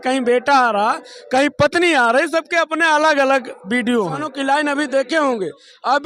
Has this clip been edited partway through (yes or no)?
yes